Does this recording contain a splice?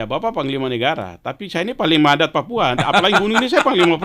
no; 0 cuts

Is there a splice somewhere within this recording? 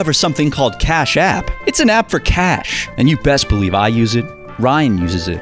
no; 0 cuts

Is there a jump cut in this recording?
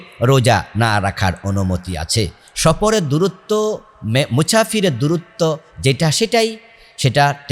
no; 0 cuts

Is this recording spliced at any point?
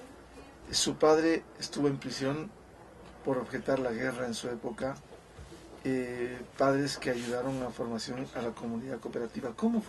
yes; 1 cut; at 8.7 s

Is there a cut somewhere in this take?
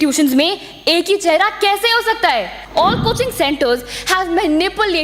yes; 1 cut; at 2.6 s

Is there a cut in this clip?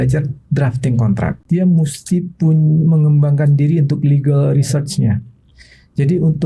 yes; 1 cut; at 1.4 s

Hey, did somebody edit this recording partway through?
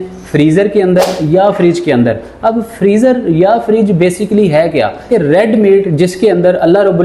yes; 1 cut; at 5.1 s

